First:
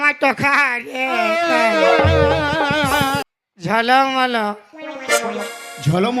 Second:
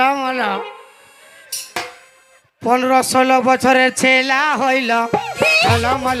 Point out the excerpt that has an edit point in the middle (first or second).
first